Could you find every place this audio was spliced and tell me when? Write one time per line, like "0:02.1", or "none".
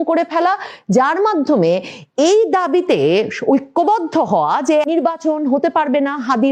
0:04.9